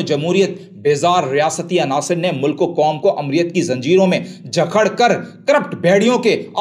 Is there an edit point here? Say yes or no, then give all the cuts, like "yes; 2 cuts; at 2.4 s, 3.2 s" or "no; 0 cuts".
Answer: no; 0 cuts